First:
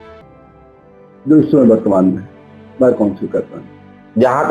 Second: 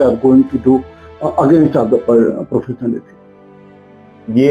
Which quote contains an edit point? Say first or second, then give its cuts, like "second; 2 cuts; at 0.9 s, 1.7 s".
first; 1 cut; at 1.2 s